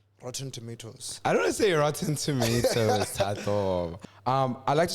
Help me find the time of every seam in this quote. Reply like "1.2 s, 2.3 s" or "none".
3.9 s